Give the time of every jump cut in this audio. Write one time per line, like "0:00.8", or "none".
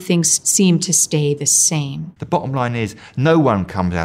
0:02.1